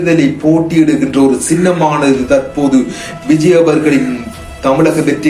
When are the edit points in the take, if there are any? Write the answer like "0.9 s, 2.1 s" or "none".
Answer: none